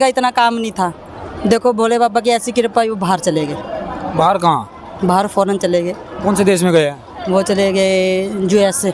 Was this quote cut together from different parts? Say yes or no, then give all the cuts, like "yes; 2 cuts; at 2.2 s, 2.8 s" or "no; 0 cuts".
no; 0 cuts